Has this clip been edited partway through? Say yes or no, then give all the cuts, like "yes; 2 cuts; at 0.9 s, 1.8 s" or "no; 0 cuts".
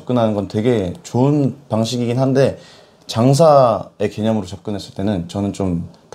no; 0 cuts